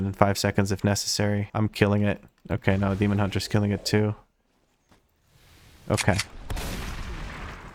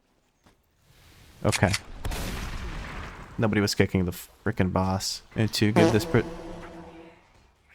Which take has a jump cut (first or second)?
second